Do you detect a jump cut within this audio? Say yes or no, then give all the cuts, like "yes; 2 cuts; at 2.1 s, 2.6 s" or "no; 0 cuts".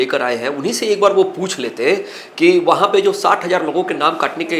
no; 0 cuts